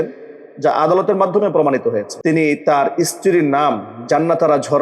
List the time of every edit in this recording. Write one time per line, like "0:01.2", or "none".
0:02.1